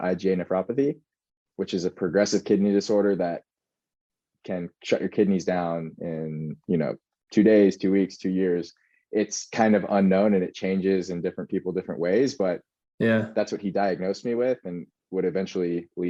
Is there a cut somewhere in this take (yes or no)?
no